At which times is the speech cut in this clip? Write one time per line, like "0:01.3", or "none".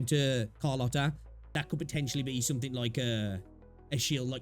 0:01.5